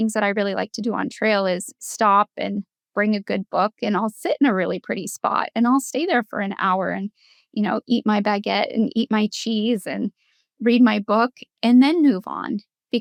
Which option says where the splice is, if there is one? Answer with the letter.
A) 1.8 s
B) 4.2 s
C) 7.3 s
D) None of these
D